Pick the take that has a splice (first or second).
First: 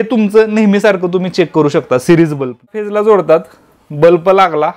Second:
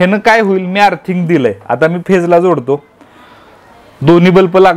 first